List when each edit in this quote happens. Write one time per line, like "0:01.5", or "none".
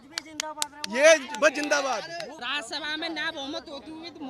0:02.3